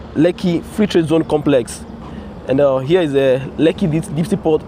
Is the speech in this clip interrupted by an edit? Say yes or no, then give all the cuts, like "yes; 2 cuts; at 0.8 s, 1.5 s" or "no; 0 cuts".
no; 0 cuts